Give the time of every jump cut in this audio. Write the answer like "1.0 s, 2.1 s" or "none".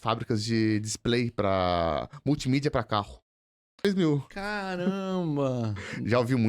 3.8 s